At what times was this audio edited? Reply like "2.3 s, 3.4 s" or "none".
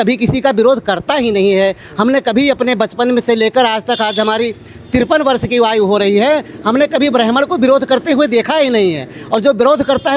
none